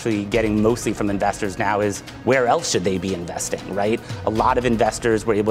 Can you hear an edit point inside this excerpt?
no; 0 cuts

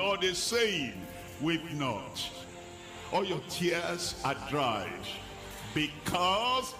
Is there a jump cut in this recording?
no; 0 cuts

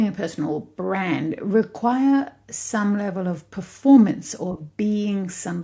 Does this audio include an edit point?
no; 0 cuts

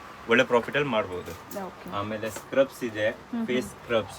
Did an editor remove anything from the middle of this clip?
no; 0 cuts

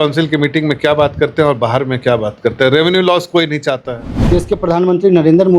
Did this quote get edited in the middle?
yes; 1 cut; at 4.2 s

